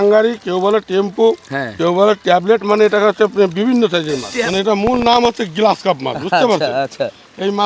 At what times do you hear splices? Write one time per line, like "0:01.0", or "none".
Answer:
0:04.3

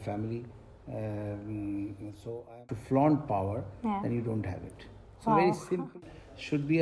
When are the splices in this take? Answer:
0:02.6
0:05.9

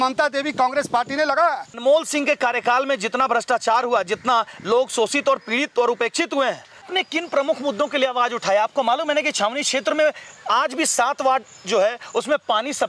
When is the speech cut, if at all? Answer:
0:01.8
0:06.9

